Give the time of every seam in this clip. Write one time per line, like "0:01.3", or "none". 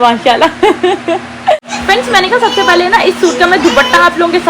0:01.5